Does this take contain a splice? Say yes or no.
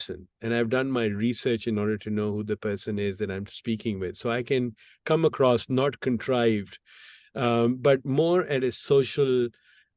no